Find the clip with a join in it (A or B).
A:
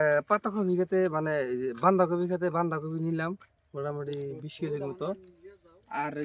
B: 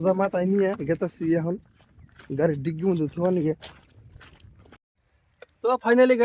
B